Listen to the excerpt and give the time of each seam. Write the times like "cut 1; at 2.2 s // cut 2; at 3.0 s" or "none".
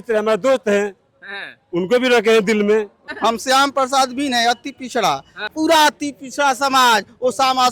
cut 1; at 3.0 s // cut 2; at 5.5 s